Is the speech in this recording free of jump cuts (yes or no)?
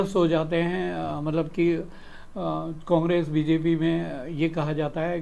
yes